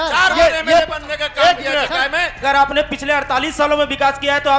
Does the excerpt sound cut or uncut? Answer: cut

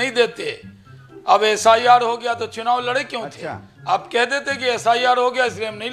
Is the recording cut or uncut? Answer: uncut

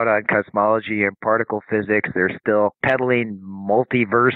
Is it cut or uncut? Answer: cut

